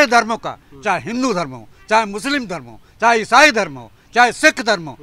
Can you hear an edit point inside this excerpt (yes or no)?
no